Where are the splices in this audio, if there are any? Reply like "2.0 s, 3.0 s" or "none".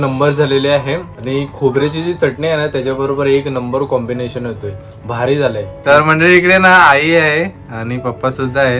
1.1 s

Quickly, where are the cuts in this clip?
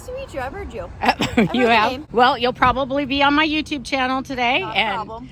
2.0 s

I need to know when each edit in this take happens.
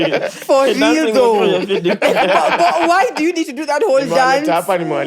none

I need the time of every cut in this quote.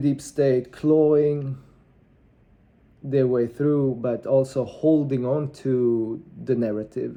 none

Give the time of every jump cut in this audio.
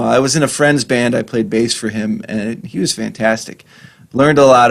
none

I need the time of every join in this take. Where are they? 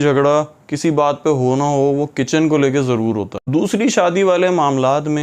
3.4 s

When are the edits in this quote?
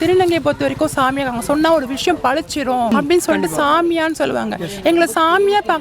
2.9 s

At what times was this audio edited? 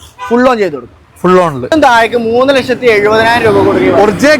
1.7 s

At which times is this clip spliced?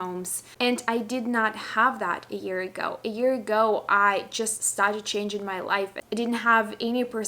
6.0 s

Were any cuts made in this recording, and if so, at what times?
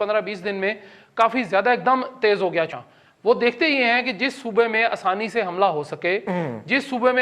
2.7 s

